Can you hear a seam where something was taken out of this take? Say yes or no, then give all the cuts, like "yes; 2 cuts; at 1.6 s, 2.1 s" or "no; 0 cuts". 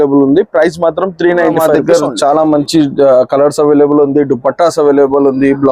yes; 1 cut; at 1.7 s